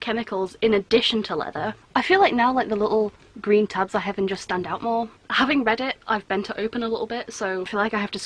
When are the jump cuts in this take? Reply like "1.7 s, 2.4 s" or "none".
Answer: none